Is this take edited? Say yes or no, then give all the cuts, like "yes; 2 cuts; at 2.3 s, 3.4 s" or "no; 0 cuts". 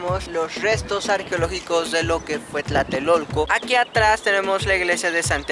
yes; 1 cut; at 3.5 s